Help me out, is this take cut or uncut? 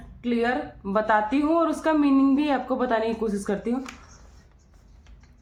uncut